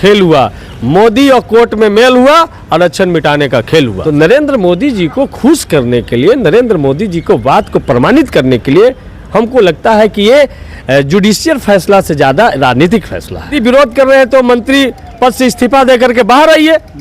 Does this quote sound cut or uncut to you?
cut